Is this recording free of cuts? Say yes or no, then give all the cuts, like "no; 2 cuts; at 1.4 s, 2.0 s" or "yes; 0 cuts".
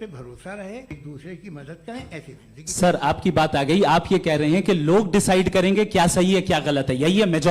no; 1 cut; at 0.9 s